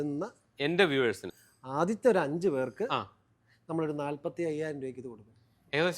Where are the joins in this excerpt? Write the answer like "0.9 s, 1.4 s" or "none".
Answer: 1.3 s